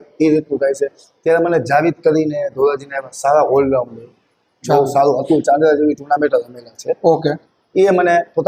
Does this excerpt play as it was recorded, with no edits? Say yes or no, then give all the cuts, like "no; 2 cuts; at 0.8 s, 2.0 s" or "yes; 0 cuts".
yes; 0 cuts